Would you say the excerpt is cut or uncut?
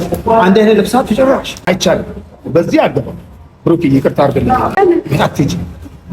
cut